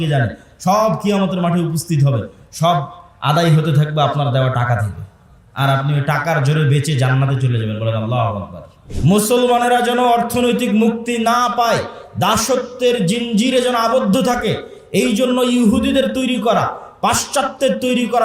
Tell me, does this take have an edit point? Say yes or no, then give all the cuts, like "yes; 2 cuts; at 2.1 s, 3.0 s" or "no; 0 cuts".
yes; 1 cut; at 8.8 s